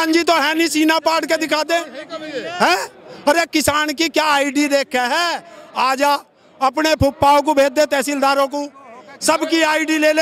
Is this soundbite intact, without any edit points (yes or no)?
yes